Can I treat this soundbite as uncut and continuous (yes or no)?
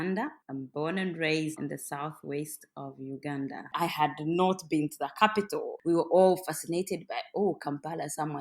no